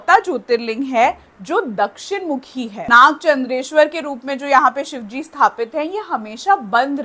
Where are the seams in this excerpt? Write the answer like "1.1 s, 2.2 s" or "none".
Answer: 2.8 s